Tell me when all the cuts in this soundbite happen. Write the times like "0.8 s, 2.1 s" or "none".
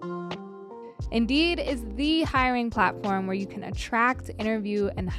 1.0 s